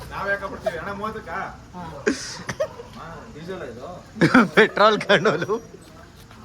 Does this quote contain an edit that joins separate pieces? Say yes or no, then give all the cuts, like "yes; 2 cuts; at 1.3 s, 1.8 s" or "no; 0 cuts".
yes; 1 cut; at 5.3 s